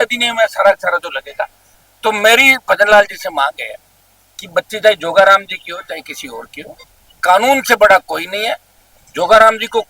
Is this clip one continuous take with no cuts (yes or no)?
no